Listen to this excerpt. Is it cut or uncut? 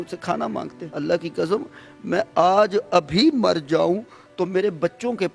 cut